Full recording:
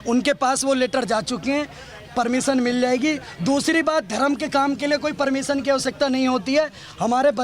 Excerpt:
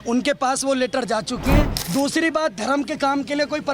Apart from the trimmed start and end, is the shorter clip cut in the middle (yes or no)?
yes